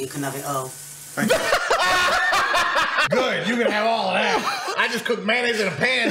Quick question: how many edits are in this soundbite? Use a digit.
2